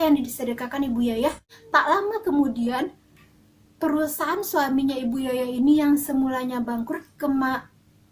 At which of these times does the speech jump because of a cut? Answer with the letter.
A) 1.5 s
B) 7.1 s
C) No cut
A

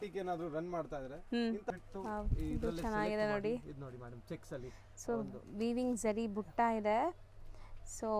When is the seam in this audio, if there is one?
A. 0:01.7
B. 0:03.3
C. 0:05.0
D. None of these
A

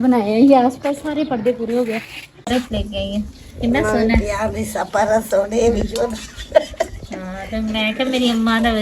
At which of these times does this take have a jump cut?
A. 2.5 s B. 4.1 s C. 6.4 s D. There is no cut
A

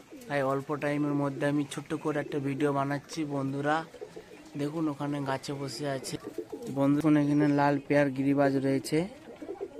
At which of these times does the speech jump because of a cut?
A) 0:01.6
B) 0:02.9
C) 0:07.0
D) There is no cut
C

